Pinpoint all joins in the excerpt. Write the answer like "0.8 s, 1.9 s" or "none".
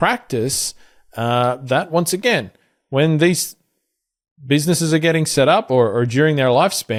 none